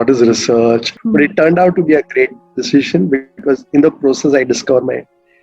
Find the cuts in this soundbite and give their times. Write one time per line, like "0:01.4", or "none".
0:00.9